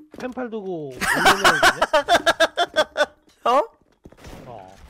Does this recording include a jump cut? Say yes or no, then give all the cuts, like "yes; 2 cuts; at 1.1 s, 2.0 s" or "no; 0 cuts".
yes; 1 cut; at 3.2 s